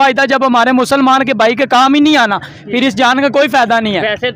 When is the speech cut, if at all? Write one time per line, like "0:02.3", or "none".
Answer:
none